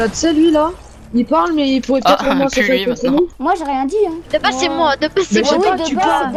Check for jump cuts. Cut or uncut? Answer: uncut